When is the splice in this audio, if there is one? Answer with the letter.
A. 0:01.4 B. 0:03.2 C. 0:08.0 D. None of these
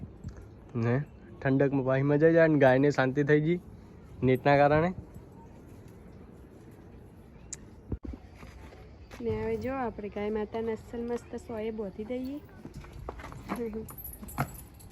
C